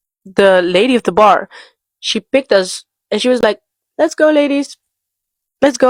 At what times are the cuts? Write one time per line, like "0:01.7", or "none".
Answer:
none